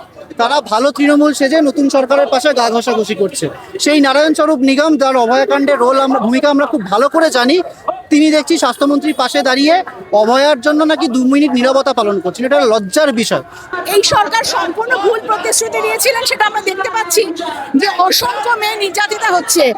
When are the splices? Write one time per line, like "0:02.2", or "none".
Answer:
0:13.6